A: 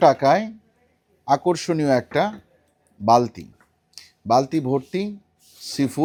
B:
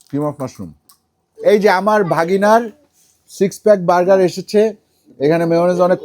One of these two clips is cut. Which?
B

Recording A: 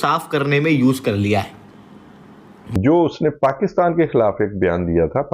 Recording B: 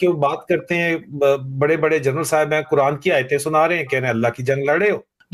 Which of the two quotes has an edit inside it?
A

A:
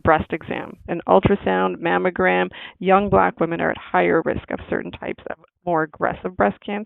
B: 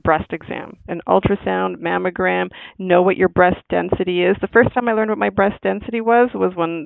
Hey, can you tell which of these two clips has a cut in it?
A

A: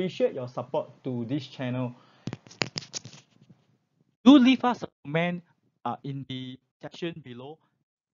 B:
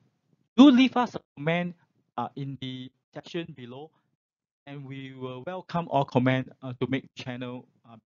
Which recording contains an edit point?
A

